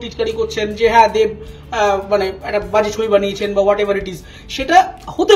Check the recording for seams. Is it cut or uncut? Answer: uncut